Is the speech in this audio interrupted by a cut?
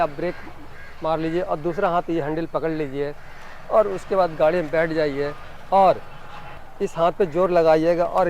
yes; 1 cut; at 6.6 s

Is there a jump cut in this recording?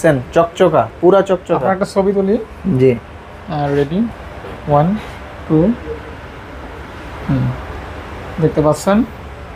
no; 0 cuts

